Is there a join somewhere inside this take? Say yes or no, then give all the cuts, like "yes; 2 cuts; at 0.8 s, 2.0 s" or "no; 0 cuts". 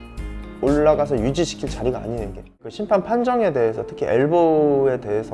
yes; 1 cut; at 2.7 s